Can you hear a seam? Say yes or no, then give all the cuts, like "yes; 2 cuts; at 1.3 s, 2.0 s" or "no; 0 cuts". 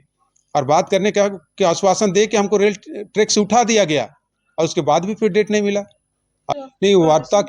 yes; 1 cut; at 6.5 s